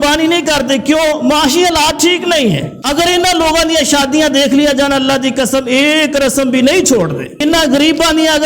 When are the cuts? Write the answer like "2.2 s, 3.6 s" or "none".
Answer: 2.7 s, 7.3 s

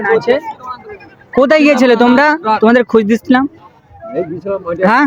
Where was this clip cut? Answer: none

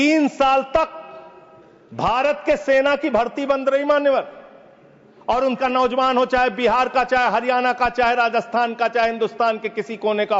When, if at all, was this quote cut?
5.6 s

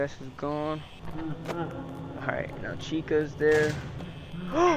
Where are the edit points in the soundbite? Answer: 1.0 s

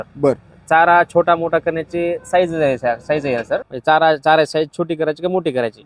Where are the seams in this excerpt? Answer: 3.7 s

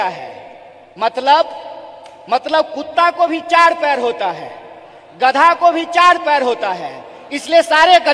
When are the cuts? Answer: none

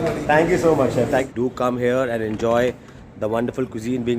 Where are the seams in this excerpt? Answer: 1.3 s

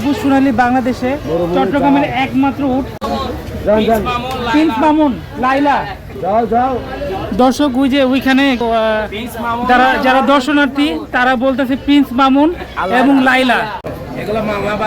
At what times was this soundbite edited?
3.2 s, 13.9 s

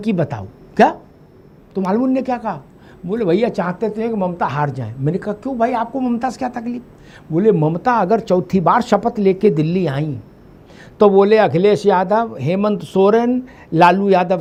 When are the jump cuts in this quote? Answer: none

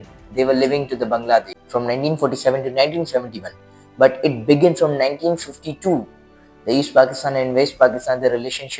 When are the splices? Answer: 1.6 s

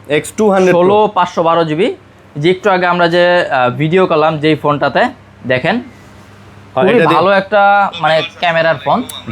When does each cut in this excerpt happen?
none

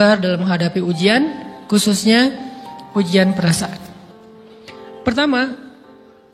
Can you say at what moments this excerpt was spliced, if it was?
none

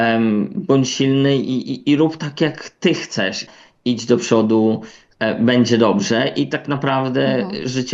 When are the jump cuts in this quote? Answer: 3.5 s

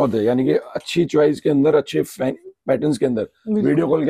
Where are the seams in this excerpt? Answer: none

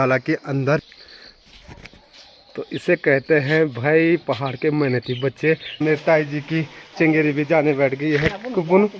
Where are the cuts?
1.0 s, 5.8 s

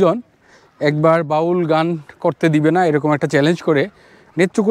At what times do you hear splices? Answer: none

